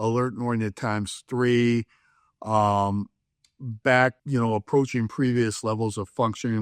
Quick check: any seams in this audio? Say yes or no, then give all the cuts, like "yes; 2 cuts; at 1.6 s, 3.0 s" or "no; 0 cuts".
yes; 1 cut; at 4.2 s